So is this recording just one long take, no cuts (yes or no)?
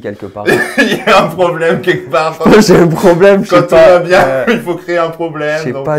yes